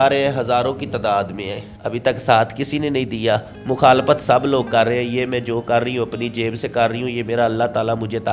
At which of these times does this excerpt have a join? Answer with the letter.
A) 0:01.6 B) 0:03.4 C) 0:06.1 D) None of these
A